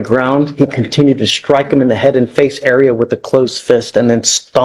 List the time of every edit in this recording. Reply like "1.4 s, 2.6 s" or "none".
none